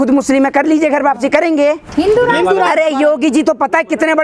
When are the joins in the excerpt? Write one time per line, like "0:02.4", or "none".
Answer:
0:01.9